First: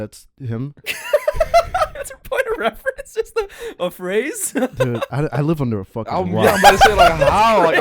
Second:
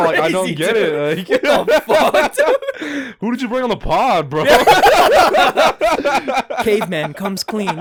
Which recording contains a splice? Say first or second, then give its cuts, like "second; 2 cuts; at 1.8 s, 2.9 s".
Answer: first; 1 cut; at 4.9 s